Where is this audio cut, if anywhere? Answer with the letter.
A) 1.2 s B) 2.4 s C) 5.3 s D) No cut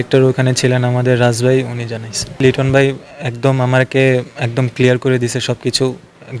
B